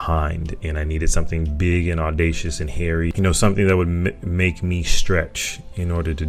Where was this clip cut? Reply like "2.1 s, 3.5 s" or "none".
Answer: 3.1 s